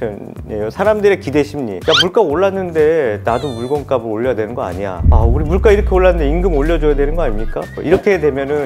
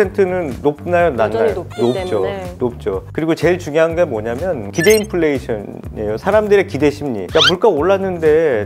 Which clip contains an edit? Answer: second; 1 cut; at 3.1 s

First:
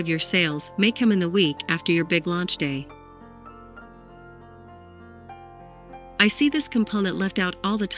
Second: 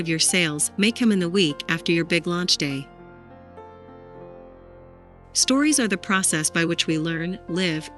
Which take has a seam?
second; 2 cuts; at 2.9 s, 5.4 s

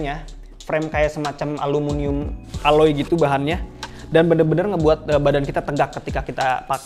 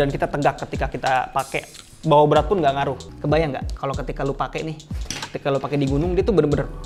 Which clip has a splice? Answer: second; 1 cut; at 3.1 s

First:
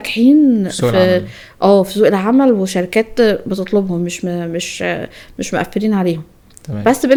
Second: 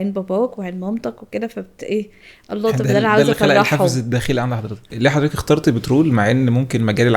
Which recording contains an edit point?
second; 1 cut; at 4.9 s

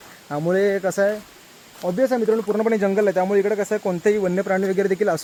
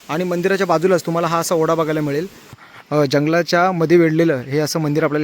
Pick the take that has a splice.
second; 1 cut; at 2.6 s

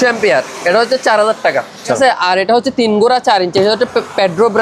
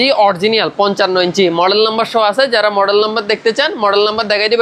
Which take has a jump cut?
first; 1 cut; at 2.0 s

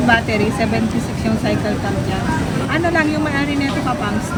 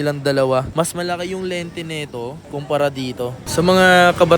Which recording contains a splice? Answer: second; 1 cut; at 3.4 s

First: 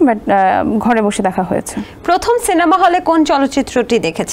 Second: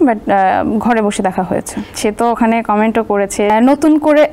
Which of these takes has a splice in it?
second; 2 cuts; at 1.9 s, 3.5 s

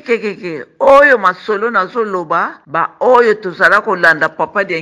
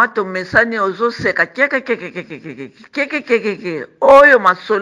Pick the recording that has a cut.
first; 1 cut; at 2.6 s

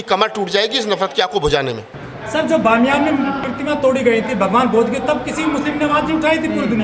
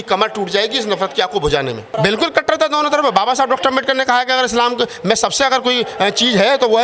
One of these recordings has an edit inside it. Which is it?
second; 1 cut; at 1.9 s

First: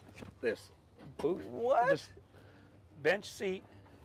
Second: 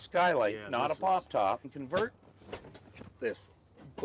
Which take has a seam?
second; 1 cut; at 1.7 s

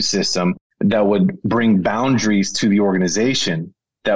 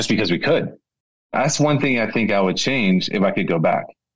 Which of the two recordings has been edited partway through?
second; 1 cut; at 1.0 s

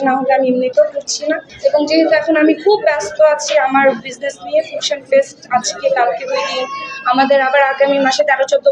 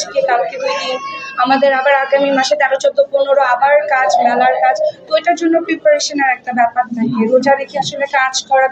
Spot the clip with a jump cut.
first; 1 cut; at 1.5 s

